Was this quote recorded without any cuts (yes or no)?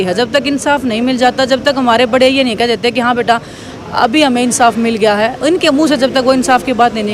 yes